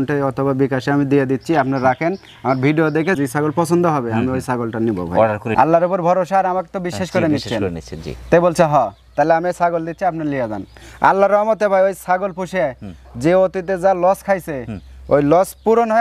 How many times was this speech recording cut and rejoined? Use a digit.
1